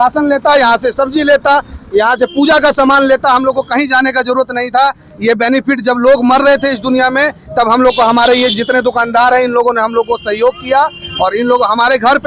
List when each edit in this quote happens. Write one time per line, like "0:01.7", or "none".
none